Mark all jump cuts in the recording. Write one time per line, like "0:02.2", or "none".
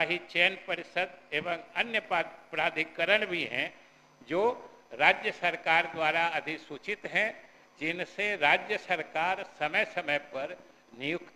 none